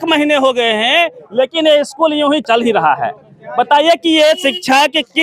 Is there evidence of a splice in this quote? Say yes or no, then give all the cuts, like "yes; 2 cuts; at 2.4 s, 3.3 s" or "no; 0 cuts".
yes; 1 cut; at 2.4 s